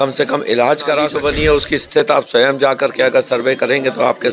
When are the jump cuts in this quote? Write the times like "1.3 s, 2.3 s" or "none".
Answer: 1.1 s